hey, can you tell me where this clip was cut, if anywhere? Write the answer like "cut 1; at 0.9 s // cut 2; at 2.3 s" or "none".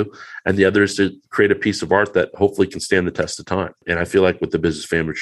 cut 1; at 3.8 s